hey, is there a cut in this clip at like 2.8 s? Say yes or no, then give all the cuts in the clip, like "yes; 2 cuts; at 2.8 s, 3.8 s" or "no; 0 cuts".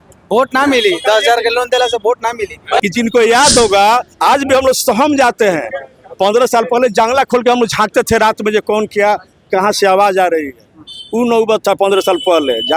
yes; 1 cut; at 2.8 s